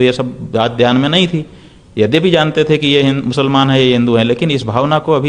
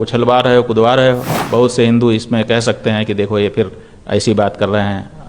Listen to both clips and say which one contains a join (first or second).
second